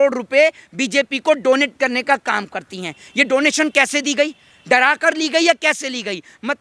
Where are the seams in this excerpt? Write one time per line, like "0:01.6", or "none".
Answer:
none